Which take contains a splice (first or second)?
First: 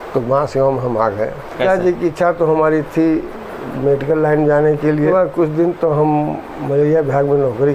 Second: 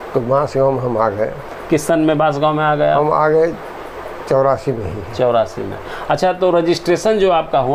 first